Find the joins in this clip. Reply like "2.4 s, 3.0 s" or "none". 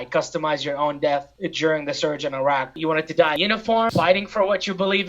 1.4 s, 2.7 s